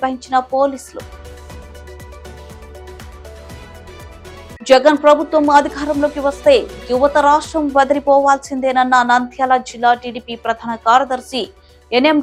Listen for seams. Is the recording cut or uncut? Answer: uncut